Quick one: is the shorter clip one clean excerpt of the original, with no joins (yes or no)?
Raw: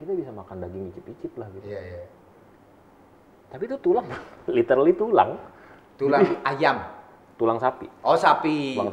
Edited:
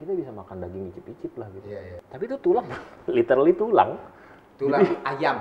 no